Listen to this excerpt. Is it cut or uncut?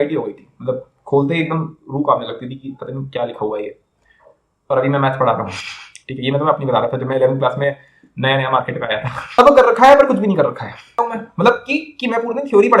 cut